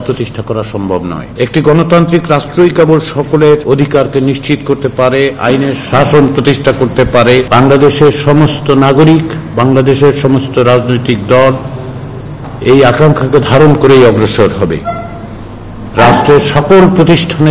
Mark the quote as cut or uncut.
cut